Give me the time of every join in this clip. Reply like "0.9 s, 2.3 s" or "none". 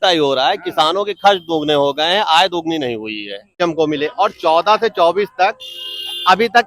3.5 s

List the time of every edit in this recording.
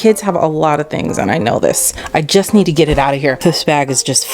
1.9 s, 3.4 s

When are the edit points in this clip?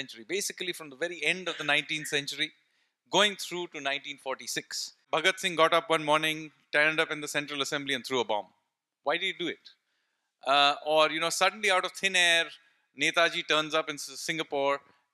5.0 s

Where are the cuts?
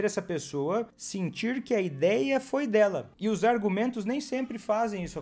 1.0 s, 3.1 s

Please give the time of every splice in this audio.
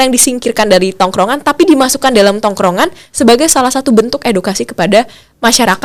none

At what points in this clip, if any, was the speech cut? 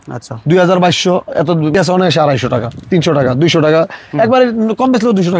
1.7 s

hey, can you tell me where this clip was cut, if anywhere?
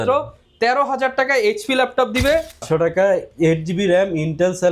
2.6 s

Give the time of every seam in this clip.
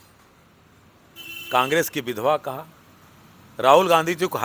none

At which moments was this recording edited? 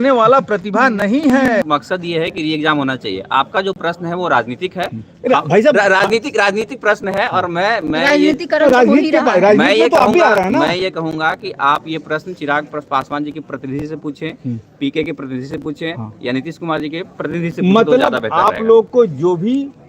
1.6 s

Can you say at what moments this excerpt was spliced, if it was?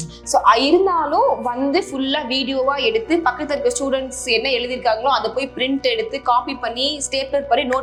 none

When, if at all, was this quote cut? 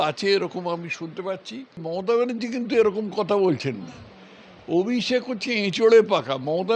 1.9 s

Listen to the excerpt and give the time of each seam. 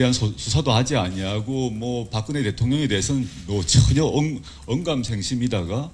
2.9 s

